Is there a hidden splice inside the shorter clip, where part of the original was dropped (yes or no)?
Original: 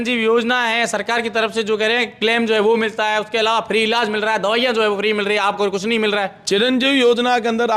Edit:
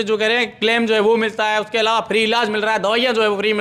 no